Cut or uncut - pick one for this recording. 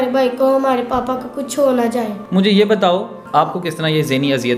cut